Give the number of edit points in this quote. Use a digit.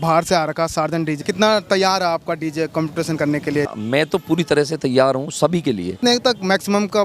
3